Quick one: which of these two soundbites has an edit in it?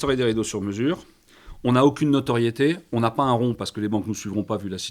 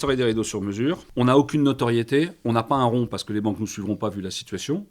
second; 1 cut; at 1.1 s

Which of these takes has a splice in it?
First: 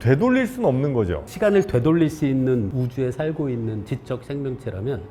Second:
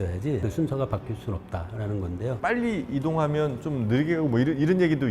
second; 1 cut; at 2.4 s

